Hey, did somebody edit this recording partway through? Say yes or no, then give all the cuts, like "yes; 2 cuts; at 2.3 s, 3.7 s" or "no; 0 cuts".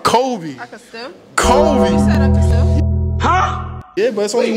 no; 0 cuts